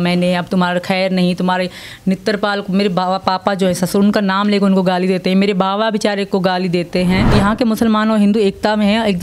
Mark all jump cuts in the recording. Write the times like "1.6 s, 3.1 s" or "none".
7.3 s